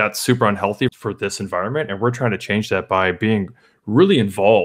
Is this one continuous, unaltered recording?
no; 1 cut; at 0.9 s

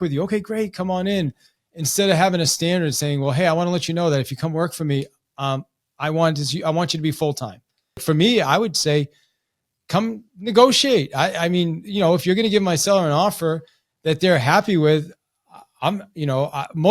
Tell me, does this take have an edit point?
yes; 1 cut; at 8.0 s

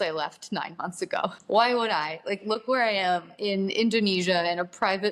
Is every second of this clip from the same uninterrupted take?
no; 2 cuts; at 1.4 s, 3.3 s

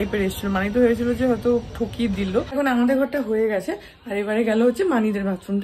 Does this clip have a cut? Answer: yes; 1 cut; at 2.5 s

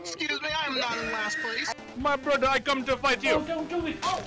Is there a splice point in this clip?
yes; 1 cut; at 1.7 s

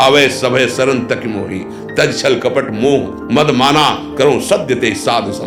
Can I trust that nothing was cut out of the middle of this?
yes; 0 cuts

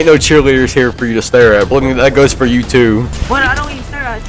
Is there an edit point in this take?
yes; 2 cuts; at 1.7 s, 3.2 s

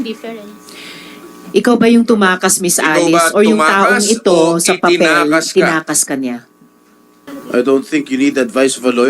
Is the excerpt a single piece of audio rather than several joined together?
no; 1 cut; at 7.3 s

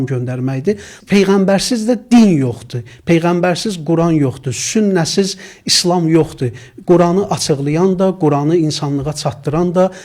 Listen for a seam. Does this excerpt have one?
yes; 1 cut; at 1.0 s

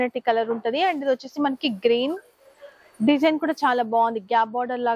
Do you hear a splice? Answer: no; 0 cuts

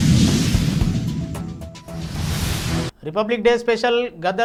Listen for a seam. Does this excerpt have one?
no; 0 cuts

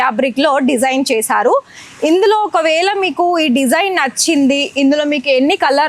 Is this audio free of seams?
yes; 0 cuts

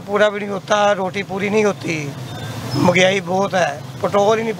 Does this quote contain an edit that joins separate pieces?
no; 0 cuts

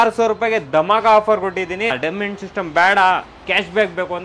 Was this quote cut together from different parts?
yes; 1 cut; at 2.0 s

